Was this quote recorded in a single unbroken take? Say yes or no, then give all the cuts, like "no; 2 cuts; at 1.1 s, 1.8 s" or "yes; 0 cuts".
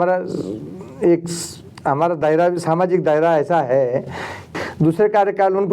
no; 1 cut; at 4.5 s